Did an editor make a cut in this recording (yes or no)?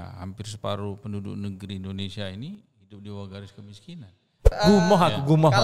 yes